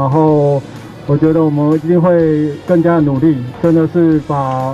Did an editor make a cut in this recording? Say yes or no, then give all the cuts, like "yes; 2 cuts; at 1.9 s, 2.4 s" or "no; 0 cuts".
yes; 1 cut; at 3.5 s